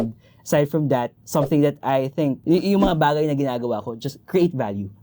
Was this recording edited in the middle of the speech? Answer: yes; 1 cut; at 2.4 s

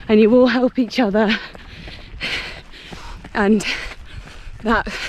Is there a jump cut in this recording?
no; 0 cuts

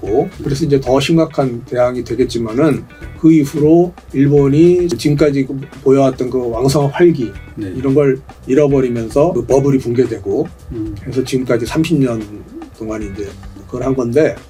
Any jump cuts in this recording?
no; 0 cuts

